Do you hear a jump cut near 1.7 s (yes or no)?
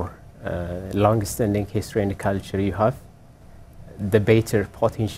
no